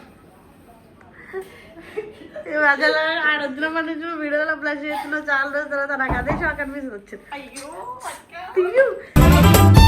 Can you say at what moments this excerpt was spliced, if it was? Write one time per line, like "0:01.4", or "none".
none